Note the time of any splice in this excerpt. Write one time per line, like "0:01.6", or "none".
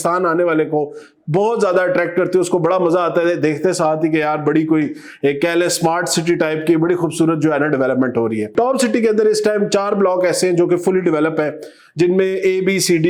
none